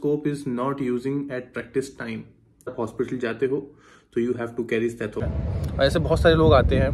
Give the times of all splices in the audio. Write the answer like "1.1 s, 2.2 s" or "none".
2.7 s, 5.2 s